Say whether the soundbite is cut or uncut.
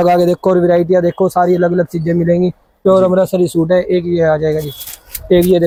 uncut